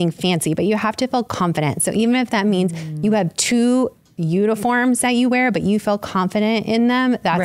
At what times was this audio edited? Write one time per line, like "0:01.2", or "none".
none